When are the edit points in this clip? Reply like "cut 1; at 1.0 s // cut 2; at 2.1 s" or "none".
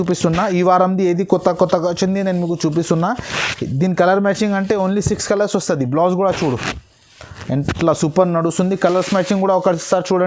none